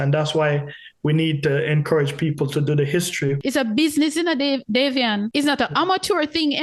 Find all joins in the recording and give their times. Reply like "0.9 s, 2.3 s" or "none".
3.4 s

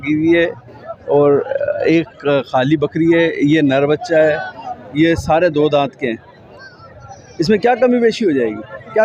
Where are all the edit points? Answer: none

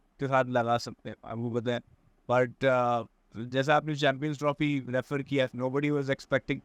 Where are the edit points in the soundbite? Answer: none

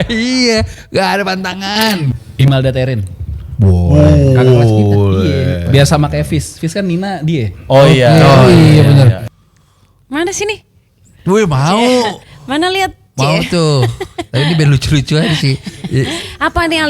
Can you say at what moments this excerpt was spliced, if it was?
2.1 s

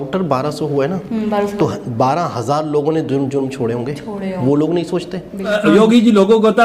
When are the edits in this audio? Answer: 5.6 s

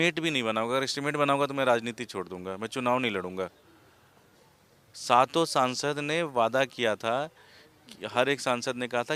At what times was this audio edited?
none

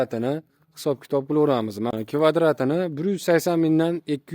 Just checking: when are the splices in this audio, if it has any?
1.9 s

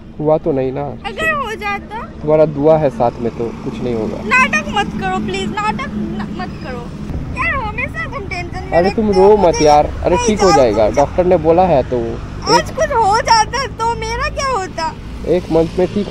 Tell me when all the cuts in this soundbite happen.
7.1 s

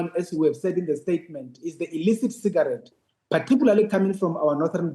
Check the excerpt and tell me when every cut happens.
none

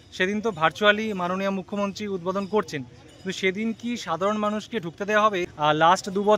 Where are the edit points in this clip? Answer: 5.5 s

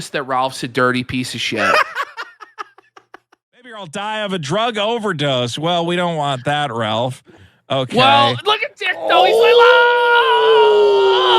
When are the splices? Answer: 3.7 s

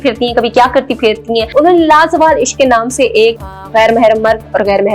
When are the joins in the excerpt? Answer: 1.5 s, 3.6 s

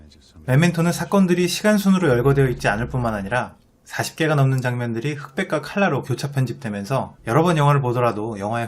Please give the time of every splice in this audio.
6.7 s

